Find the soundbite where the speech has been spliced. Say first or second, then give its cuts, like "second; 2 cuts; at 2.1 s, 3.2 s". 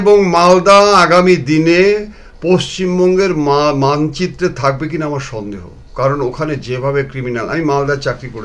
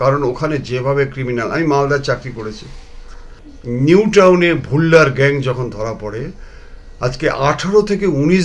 second; 1 cut; at 3.5 s